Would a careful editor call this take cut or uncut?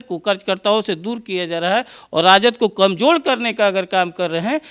uncut